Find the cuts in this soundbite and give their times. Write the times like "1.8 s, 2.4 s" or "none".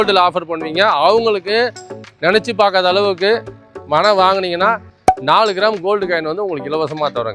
none